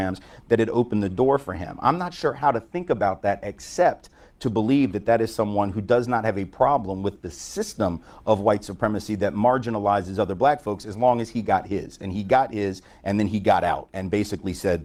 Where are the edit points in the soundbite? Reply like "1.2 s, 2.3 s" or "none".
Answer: none